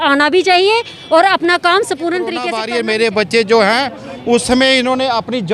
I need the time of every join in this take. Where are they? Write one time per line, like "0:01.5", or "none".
0:02.6